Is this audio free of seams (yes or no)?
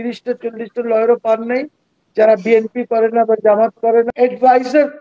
no